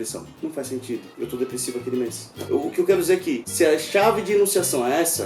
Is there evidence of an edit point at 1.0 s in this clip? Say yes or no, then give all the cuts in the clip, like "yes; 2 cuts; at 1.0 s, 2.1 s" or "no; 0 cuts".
no; 2 cuts; at 2.3 s, 3.4 s